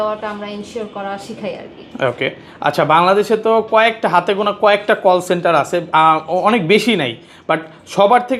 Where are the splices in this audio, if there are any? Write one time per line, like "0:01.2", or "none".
none